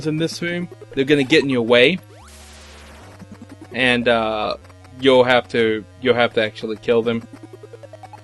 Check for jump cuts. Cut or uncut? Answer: uncut